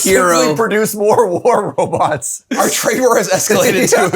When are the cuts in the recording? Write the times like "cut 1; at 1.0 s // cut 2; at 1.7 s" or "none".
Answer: cut 1; at 2.5 s